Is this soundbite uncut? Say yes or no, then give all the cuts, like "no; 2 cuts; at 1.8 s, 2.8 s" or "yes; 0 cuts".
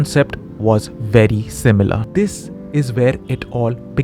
no; 1 cut; at 2.0 s